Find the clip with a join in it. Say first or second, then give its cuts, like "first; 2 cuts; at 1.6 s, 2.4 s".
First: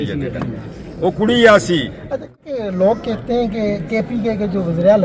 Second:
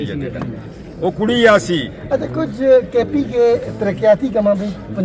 first; 1 cut; at 2.5 s